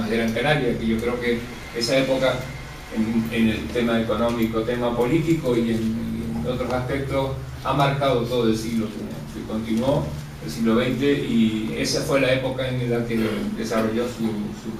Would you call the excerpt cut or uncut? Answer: uncut